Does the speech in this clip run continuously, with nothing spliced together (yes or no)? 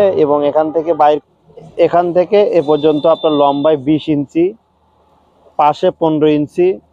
no